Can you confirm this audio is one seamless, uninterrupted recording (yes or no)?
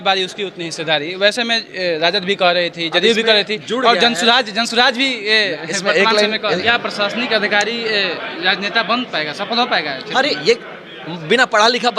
no